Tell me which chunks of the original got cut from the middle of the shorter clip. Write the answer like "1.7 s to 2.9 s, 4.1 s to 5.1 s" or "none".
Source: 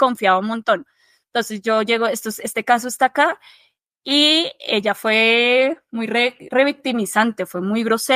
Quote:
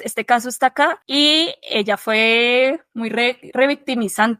3.4 s to 4.0 s